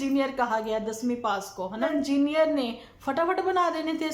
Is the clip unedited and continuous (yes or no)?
no